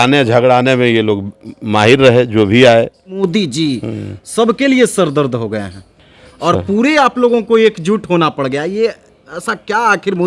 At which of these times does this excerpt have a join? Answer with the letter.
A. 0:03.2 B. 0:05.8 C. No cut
A